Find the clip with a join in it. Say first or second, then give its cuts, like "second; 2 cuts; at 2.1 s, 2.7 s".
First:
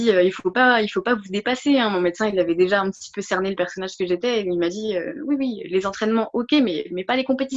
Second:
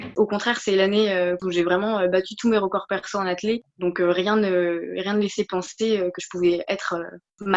second; 1 cut; at 1.4 s